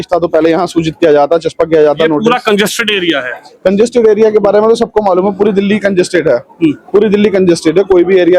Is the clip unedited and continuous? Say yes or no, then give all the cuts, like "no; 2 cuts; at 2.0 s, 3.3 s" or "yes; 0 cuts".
yes; 0 cuts